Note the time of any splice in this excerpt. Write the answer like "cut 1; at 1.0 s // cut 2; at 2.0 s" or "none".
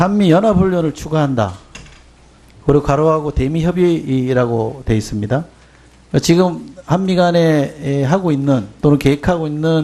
cut 1; at 8.0 s